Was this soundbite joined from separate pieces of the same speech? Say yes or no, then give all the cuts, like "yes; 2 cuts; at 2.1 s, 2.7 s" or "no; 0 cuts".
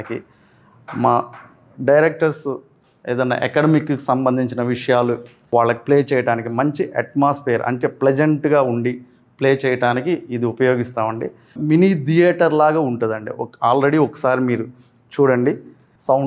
no; 0 cuts